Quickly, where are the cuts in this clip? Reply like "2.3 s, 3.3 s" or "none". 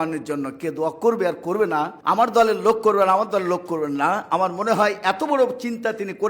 1.9 s